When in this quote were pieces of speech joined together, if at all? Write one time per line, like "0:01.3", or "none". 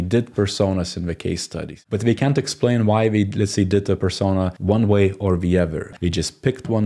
0:01.8
0:05.9